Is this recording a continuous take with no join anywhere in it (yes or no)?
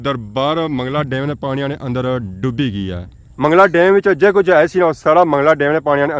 yes